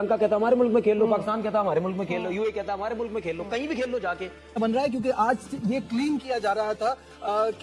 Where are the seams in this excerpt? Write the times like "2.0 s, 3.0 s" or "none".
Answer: 4.4 s

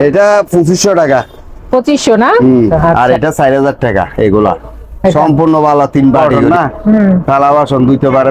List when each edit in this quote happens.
2.8 s, 6.3 s

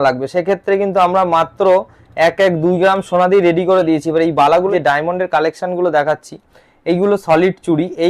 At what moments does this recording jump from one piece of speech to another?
4.7 s

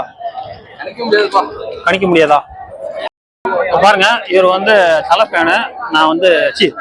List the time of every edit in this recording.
3.4 s

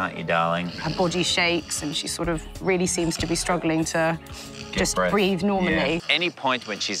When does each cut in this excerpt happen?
0.8 s, 6.1 s

